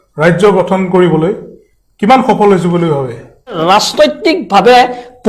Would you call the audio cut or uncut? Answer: cut